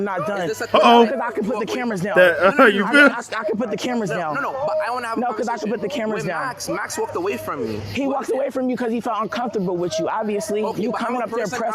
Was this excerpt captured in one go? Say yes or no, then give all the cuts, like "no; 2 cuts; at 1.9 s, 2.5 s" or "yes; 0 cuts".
yes; 0 cuts